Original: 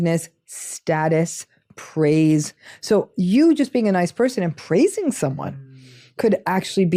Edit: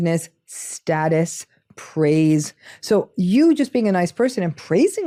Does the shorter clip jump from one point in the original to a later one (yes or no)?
no